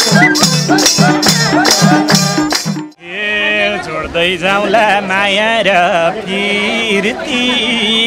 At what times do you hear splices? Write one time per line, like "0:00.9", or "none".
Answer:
0:02.7